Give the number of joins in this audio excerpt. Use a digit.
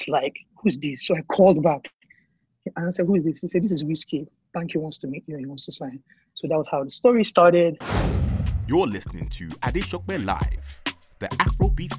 1